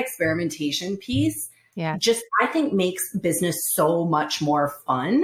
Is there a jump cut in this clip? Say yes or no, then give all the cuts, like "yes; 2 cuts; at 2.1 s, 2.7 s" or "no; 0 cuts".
no; 0 cuts